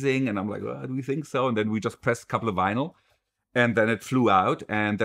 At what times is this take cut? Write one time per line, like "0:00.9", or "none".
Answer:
none